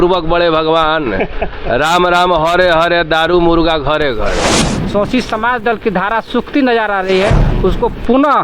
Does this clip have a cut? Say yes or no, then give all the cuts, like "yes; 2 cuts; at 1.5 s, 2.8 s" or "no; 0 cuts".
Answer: yes; 1 cut; at 4.5 s